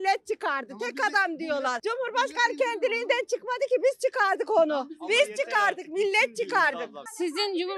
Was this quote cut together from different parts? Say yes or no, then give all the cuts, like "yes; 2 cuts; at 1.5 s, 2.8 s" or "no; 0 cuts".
no; 0 cuts